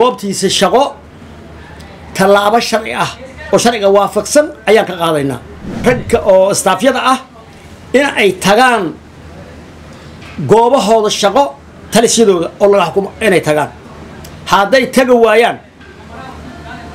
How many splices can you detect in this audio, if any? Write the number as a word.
one